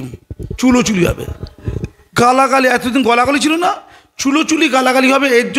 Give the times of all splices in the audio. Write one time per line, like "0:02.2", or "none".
none